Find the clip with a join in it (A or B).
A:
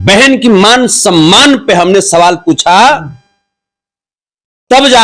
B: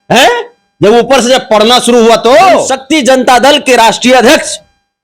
B